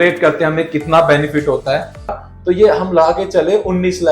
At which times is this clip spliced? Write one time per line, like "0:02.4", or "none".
0:02.1